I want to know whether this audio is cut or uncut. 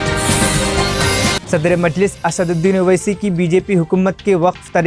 cut